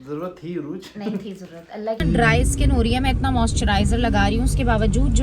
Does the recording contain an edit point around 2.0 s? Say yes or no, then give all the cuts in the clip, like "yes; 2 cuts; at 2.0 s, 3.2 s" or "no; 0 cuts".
yes; 1 cut; at 2.0 s